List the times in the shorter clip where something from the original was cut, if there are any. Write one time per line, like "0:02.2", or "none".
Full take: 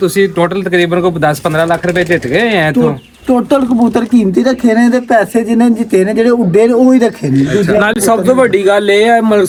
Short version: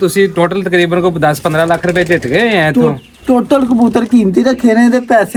none